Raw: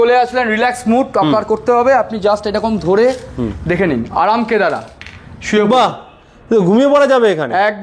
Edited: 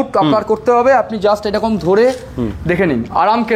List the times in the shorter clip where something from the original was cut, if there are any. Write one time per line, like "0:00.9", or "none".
none